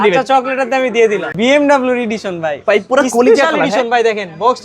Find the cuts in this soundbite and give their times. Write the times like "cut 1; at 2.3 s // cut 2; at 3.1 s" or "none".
cut 1; at 1.3 s